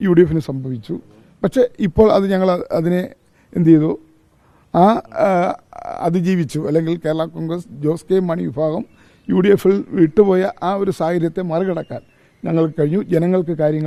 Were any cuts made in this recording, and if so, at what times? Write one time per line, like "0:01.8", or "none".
none